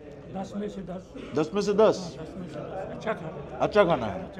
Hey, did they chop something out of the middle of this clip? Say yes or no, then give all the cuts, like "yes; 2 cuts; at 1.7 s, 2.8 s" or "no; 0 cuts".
no; 0 cuts